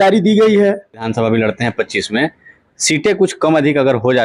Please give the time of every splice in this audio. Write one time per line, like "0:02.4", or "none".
0:01.1